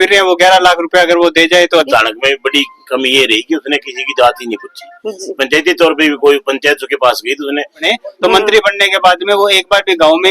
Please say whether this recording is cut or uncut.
cut